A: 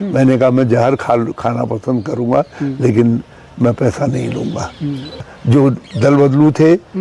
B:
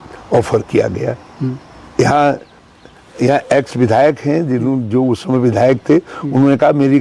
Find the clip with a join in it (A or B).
A